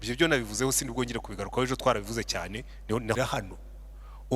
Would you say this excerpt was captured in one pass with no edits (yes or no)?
no